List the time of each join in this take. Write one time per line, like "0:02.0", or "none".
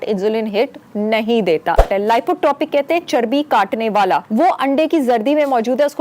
0:01.8
0:04.3